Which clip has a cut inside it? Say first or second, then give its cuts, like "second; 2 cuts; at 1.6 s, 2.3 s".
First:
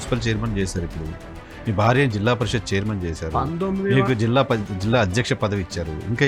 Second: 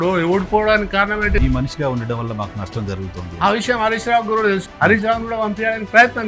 second; 2 cuts; at 1.4 s, 4.7 s